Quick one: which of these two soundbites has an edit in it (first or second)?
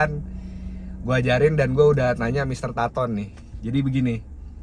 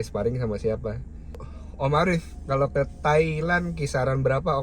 second